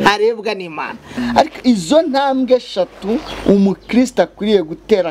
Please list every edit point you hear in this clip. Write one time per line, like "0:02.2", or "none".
0:01.1